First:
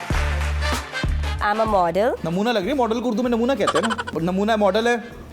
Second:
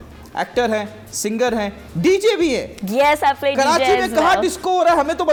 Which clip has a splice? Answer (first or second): first